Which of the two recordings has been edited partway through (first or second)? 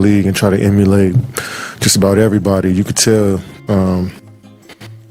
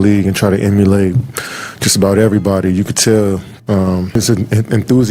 second